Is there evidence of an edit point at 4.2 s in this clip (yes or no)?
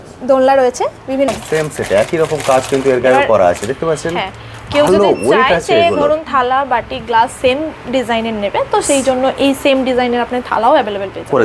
no